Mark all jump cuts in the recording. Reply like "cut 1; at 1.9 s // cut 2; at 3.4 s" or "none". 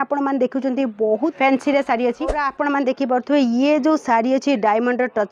cut 1; at 1.3 s // cut 2; at 2.4 s